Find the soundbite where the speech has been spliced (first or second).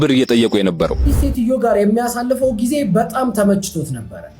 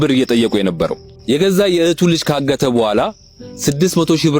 first